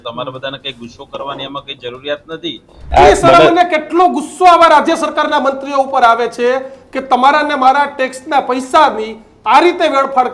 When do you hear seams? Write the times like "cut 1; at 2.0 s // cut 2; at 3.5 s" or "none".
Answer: cut 1; at 2.9 s